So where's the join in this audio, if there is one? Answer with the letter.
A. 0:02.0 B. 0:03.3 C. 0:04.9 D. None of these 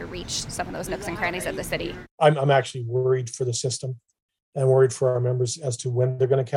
A